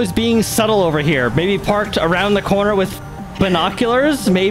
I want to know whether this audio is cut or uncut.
uncut